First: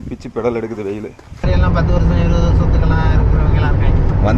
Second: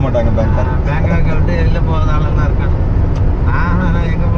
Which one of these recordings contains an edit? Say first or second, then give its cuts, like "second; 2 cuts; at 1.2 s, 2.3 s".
first; 1 cut; at 1.4 s